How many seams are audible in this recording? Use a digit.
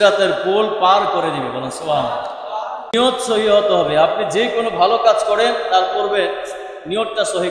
1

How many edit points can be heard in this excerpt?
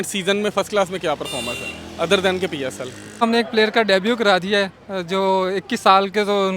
1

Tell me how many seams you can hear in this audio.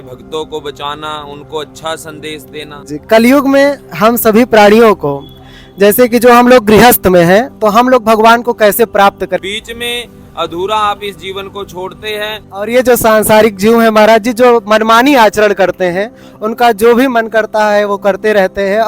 3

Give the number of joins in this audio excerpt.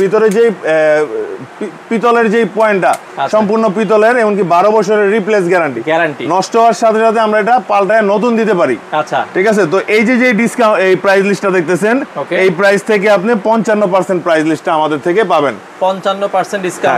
0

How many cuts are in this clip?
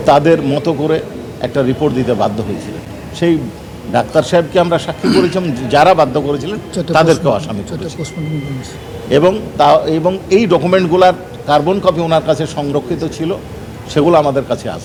0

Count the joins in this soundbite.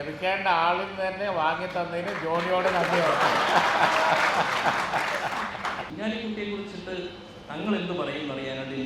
1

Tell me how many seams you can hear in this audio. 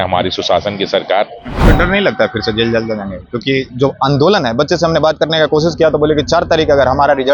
1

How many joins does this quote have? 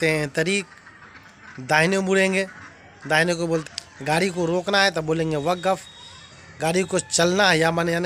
1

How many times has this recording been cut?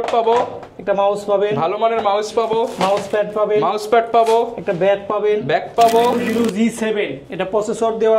1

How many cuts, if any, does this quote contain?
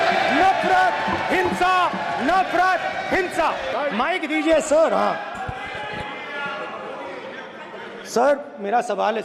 1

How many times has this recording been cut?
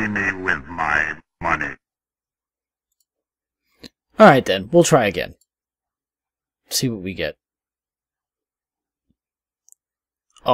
1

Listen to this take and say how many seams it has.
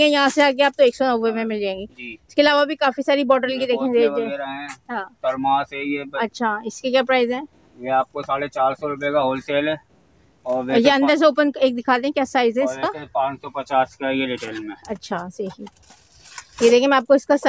0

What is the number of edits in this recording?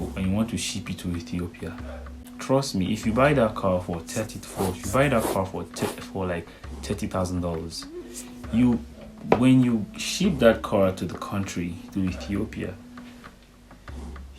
1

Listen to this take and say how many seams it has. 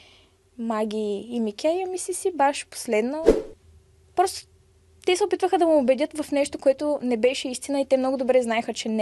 1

